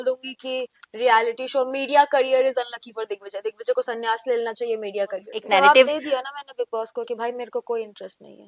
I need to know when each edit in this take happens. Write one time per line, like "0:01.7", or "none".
0:05.3